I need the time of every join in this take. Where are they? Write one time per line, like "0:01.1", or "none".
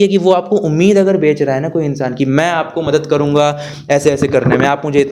none